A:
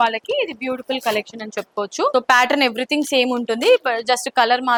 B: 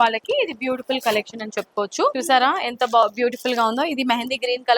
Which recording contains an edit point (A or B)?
B